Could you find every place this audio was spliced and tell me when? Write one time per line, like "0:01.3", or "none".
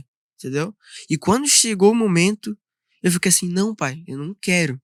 none